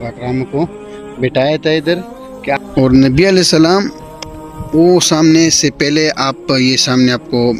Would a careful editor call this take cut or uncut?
cut